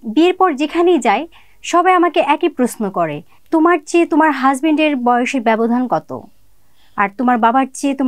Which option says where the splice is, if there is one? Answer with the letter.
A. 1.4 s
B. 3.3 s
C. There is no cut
C